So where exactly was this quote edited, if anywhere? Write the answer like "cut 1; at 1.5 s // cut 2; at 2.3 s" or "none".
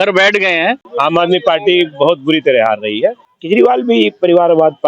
cut 1; at 0.9 s // cut 2; at 3.3 s